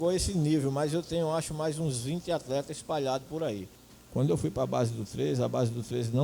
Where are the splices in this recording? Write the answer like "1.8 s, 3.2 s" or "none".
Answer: 3.7 s